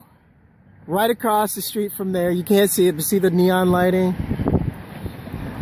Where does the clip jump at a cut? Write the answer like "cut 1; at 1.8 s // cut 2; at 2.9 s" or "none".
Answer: cut 1; at 1.6 s